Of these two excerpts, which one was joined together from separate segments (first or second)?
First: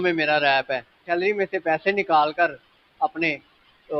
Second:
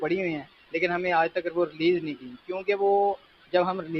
first